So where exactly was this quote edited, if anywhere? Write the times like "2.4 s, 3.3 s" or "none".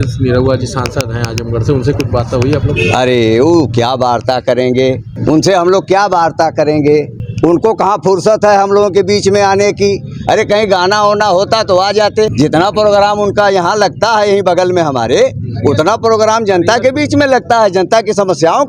5.1 s, 7.2 s, 12.3 s